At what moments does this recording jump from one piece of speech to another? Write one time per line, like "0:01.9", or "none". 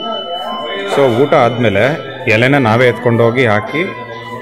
none